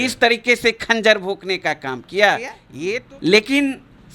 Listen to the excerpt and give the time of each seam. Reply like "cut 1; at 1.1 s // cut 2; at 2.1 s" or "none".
cut 1; at 2.6 s